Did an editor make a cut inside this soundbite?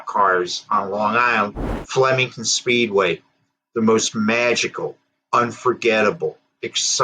yes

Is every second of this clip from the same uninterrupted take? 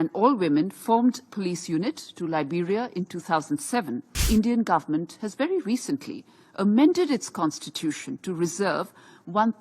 no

